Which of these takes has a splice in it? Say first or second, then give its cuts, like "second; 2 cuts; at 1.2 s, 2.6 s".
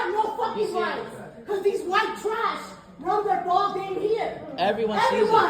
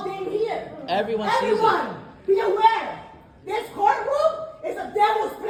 first; 1 cut; at 1.1 s